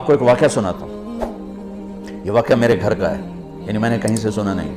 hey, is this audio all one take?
no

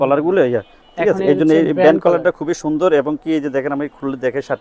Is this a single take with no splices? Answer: yes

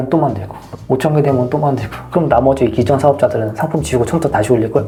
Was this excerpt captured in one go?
yes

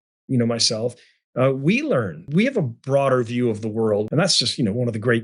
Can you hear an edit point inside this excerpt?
yes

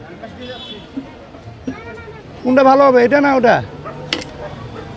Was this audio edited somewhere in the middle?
no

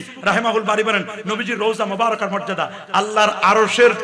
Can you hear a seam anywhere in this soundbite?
no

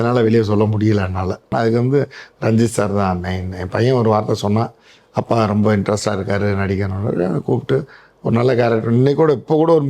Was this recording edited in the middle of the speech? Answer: yes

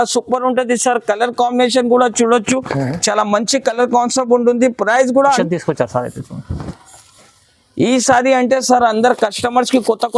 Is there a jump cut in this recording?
yes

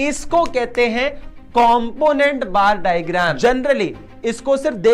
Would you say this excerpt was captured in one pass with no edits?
no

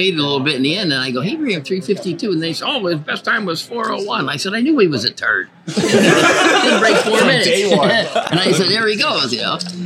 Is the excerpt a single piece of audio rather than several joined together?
yes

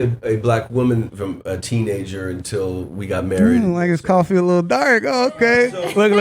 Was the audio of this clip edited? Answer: yes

